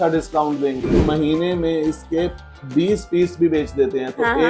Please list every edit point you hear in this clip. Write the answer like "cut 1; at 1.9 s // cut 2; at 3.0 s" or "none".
cut 1; at 1.1 s

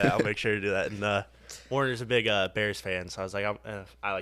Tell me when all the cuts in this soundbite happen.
none

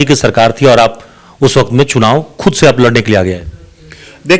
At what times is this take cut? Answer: none

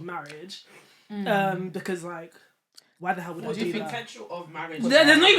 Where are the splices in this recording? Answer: none

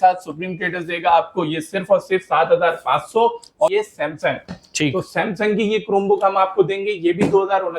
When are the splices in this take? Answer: cut 1; at 3.7 s

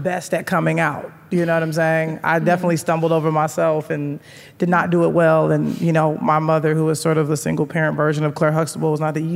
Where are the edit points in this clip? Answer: none

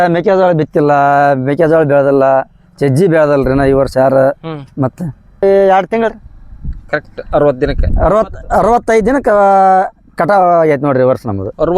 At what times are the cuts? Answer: cut 1; at 5.4 s

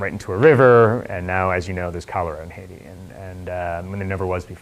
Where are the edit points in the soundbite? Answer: cut 1; at 3.6 s

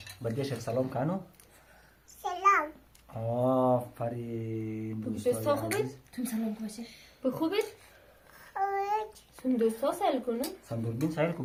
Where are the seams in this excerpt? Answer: none

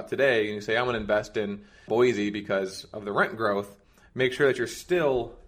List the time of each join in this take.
none

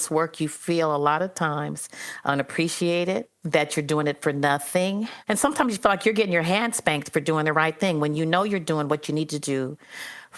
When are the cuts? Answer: cut 1; at 3.3 s // cut 2; at 5.2 s

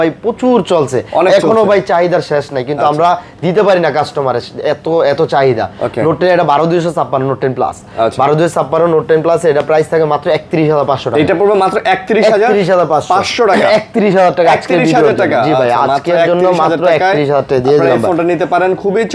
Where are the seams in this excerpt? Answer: none

